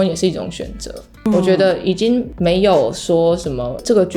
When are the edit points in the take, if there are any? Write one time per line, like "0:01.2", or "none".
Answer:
0:01.3